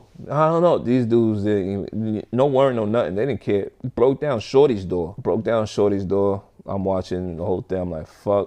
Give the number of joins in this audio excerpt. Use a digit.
0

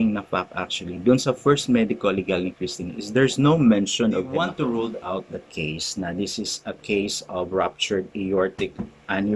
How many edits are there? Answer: 1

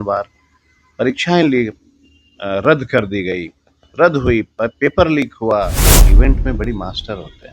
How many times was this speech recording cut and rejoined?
1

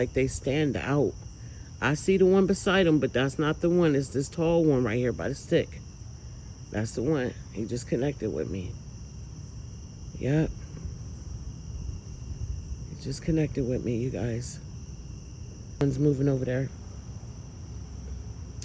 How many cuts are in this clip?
1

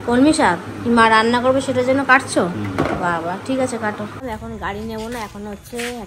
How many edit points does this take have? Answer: 1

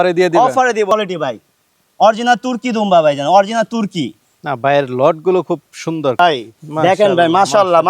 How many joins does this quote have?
2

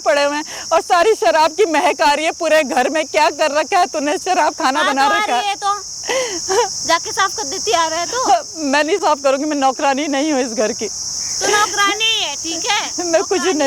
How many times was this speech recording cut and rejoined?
0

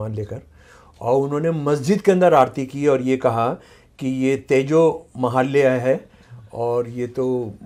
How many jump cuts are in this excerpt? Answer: 0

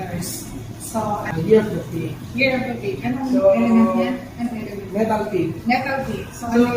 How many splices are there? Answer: 1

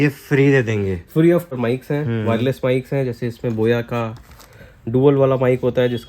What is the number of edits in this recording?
1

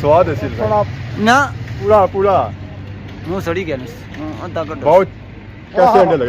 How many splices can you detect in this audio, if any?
1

